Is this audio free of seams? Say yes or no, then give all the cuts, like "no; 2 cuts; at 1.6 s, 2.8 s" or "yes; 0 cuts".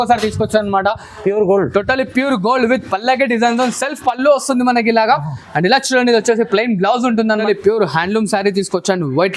no; 1 cut; at 7.4 s